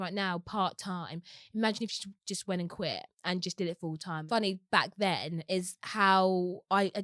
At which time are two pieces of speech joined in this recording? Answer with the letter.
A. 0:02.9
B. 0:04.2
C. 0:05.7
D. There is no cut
B